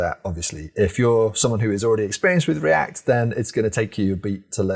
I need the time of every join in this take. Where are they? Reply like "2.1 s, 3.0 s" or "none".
none